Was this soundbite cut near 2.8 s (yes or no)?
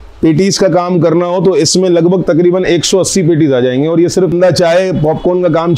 no